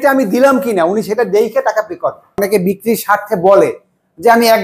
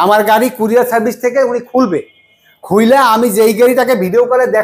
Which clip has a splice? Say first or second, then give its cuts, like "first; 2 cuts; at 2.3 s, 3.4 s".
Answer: first; 1 cut; at 2.4 s